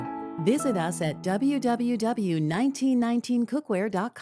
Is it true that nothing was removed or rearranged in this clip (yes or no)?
yes